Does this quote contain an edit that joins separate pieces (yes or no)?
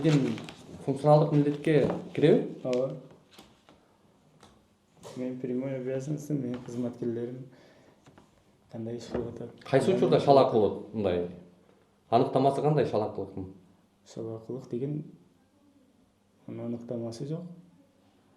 no